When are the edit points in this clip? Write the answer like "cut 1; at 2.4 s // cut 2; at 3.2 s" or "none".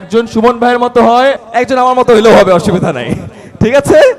cut 1; at 1.4 s